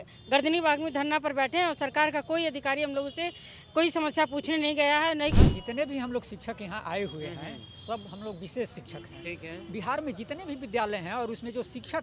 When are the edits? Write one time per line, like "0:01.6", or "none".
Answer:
0:05.4